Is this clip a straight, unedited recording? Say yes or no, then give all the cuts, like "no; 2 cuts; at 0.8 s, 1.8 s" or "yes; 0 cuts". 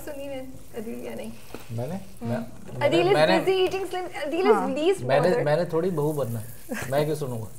yes; 0 cuts